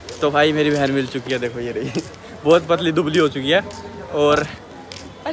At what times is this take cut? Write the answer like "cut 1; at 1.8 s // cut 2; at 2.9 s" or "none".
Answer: none